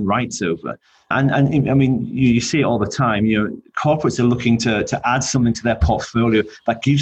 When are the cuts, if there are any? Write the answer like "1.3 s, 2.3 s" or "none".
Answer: none